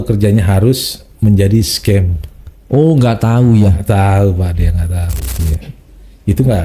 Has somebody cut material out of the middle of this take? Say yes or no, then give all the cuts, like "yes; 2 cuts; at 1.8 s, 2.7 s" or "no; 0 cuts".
yes; 1 cut; at 5.3 s